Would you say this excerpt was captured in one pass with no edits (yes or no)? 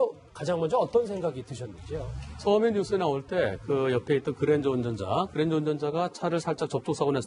no